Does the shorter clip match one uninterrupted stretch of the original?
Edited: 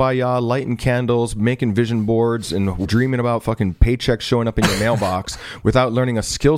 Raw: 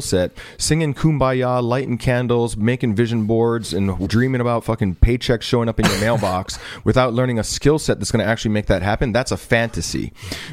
yes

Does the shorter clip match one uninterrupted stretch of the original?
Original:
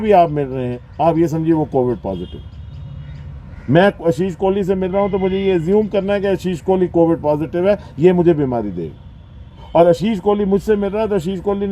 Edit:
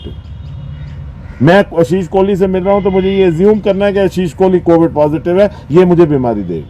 yes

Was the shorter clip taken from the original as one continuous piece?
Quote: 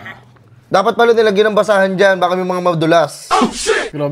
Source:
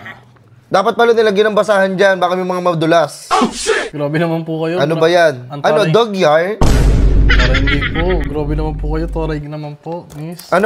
yes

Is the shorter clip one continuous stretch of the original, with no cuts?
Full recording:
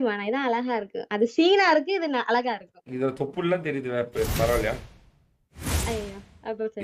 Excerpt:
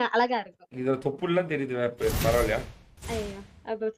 no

